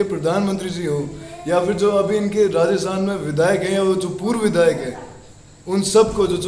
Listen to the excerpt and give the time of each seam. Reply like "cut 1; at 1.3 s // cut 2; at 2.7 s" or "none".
none